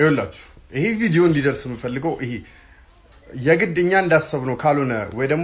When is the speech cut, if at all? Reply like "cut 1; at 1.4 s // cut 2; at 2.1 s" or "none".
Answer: none